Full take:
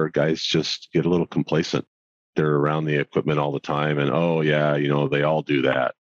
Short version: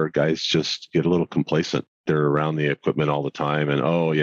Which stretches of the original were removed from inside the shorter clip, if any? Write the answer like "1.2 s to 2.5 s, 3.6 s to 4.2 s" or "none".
1.9 s to 2.2 s